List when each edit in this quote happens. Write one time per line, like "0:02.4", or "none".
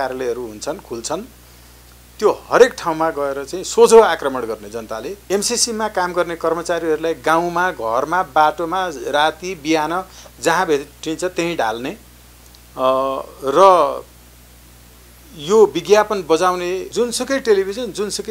0:05.2
0:16.9